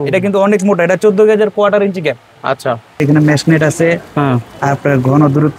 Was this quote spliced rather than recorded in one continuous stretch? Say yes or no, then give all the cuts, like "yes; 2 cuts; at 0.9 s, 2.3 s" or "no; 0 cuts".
yes; 1 cut; at 3.0 s